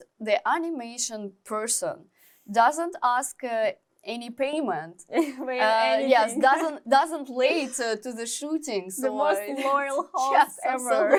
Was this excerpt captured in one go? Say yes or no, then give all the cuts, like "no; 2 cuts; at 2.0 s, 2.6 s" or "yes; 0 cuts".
yes; 0 cuts